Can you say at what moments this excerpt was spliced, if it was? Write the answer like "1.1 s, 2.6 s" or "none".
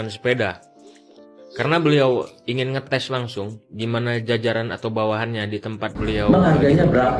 6.3 s